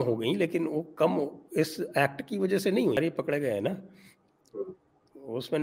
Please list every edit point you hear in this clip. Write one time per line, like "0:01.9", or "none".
0:03.0

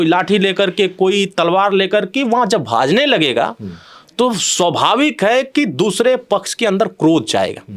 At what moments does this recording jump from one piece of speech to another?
none

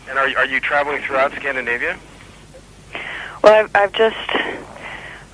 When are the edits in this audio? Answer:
none

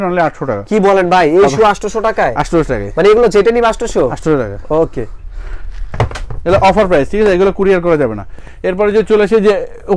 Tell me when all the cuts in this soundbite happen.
none

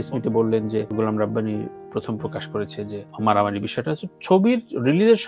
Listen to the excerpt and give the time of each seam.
0:00.9
0:03.1

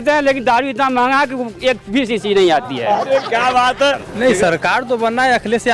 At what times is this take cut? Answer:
none

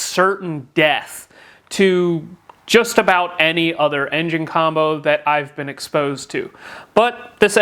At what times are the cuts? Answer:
none

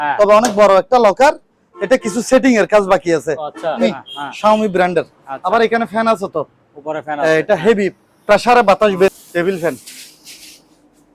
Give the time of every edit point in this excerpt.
0:03.8
0:09.1

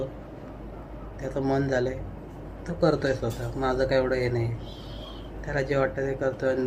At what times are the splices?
none

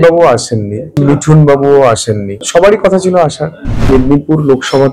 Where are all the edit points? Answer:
0:00.9
0:02.3
0:03.9

